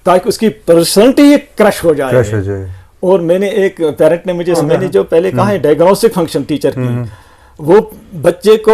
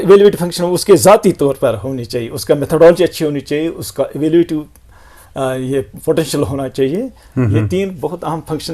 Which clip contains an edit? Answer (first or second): first